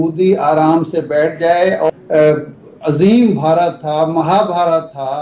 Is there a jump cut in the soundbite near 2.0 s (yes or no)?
yes